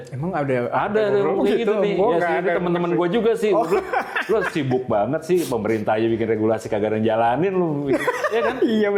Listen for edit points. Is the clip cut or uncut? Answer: uncut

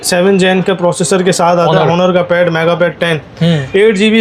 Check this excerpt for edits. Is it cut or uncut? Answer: uncut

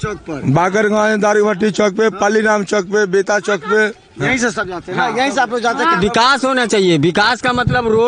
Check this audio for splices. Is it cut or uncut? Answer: cut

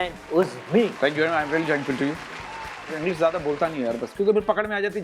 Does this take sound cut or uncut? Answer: cut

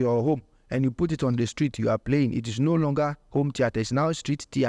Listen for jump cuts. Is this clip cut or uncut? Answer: uncut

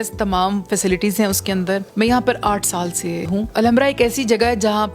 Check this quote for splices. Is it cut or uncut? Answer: cut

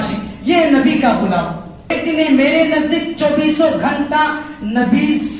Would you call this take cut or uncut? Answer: cut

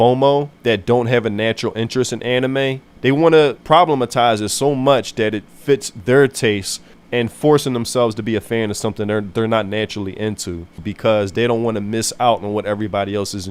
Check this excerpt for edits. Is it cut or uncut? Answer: cut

